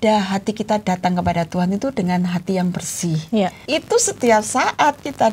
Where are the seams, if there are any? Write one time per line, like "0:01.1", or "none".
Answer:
0:03.7